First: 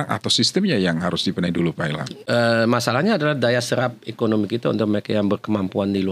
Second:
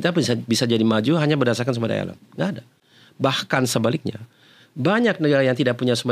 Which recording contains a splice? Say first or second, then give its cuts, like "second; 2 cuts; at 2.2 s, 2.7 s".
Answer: first; 1 cut; at 2.1 s